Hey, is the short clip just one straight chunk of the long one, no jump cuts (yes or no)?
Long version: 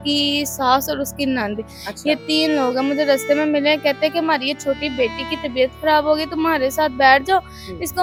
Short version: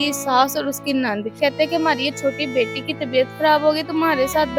no